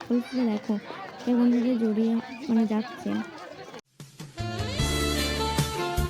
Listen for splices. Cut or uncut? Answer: uncut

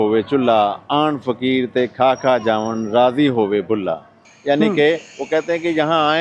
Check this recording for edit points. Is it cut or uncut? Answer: uncut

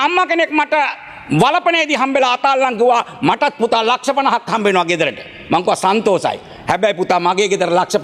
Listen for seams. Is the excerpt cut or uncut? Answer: uncut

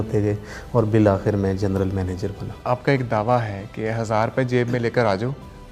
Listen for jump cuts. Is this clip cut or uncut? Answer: cut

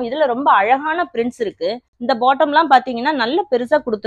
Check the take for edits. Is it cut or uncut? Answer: uncut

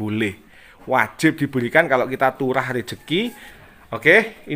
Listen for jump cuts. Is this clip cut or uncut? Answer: cut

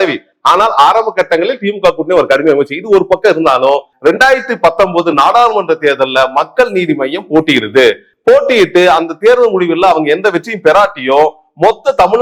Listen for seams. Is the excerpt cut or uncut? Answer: cut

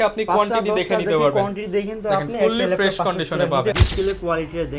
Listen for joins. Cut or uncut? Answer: cut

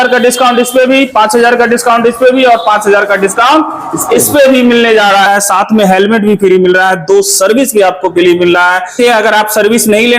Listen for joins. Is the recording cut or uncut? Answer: cut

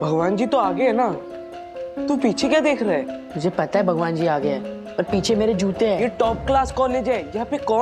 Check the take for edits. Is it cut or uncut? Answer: cut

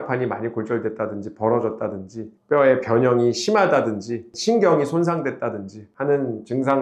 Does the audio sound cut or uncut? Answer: uncut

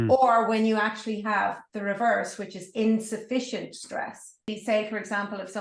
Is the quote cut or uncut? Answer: cut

